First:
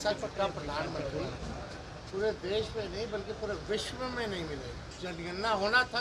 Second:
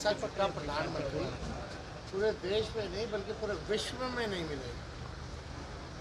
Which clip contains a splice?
first; 1 cut; at 4.8 s

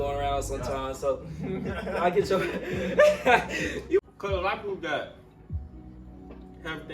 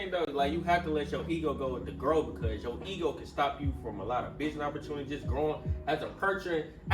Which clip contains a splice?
first; 1 cut; at 4.0 s

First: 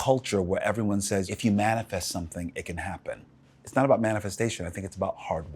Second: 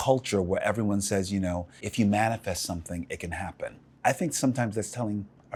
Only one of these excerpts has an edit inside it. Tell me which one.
first; 2 cuts; at 1.3 s, 3.4 s

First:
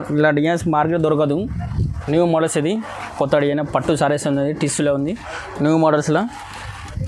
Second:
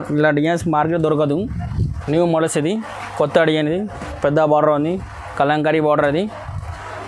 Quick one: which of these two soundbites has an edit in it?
first; 1 cut; at 3.1 s

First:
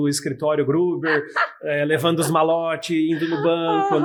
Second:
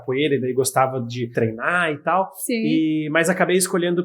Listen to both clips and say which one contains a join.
second; 1 cut; at 1.3 s

